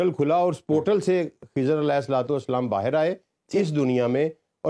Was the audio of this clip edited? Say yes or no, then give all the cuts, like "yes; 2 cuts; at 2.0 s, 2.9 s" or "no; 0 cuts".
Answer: no; 0 cuts